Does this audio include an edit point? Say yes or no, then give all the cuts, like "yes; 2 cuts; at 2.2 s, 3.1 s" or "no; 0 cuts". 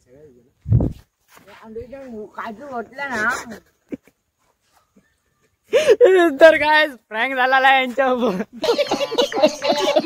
yes; 1 cut; at 8.6 s